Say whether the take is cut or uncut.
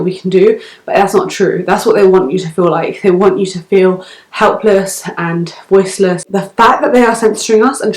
cut